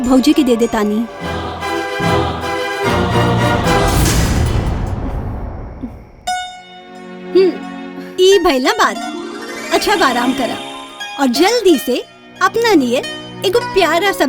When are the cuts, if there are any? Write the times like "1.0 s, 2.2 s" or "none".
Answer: 1.3 s

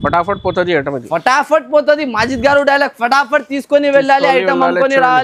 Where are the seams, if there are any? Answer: none

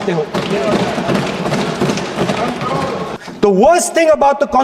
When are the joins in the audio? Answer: 3.2 s

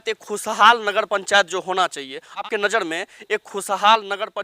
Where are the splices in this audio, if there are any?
2.4 s

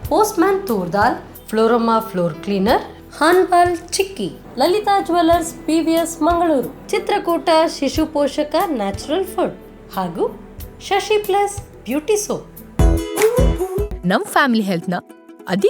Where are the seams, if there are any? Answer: 12.6 s

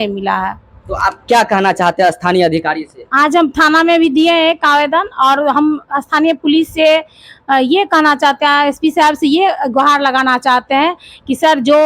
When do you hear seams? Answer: none

